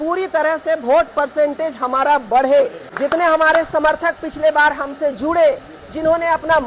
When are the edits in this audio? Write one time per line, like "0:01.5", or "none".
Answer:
0:02.8